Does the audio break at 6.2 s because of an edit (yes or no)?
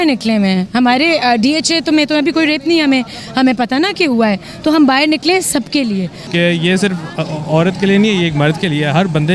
yes